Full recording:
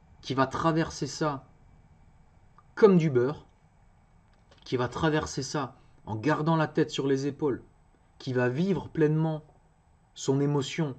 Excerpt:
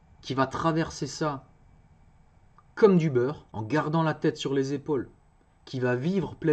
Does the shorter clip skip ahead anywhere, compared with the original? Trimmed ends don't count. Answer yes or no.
yes